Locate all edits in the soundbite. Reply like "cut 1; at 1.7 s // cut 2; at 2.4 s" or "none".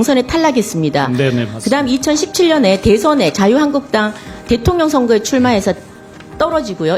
none